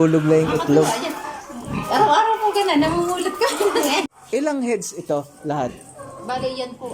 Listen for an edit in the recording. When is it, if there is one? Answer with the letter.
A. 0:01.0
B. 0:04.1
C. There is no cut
B